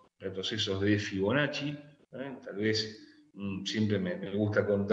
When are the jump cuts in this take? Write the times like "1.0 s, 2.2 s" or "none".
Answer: 2.6 s